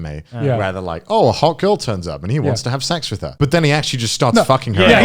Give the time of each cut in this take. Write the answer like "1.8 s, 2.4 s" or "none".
3.2 s